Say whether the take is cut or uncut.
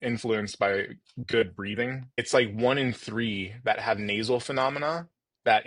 cut